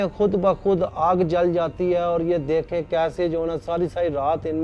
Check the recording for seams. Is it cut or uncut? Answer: uncut